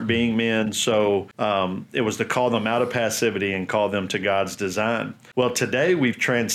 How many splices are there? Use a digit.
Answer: 2